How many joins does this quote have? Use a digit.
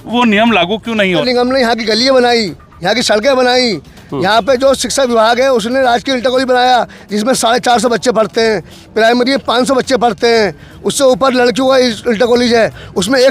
1